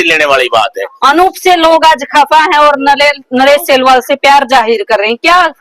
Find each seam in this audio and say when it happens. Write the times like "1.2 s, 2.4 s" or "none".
0.9 s, 1.7 s